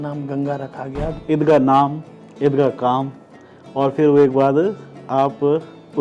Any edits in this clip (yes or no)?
yes